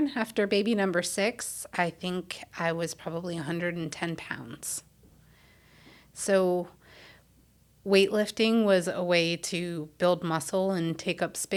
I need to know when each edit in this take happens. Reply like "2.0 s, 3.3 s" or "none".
none